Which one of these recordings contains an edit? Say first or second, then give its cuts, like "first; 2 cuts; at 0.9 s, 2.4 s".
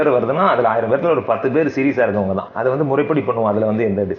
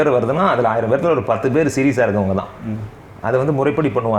first; 1 cut; at 2.5 s